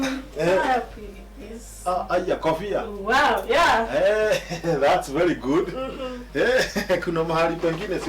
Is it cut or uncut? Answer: uncut